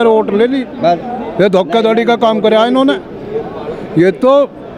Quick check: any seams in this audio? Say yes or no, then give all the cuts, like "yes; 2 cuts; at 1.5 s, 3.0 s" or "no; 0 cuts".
no; 0 cuts